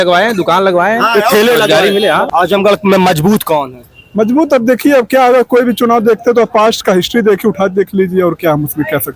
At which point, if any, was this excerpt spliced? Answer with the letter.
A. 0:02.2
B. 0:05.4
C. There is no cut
A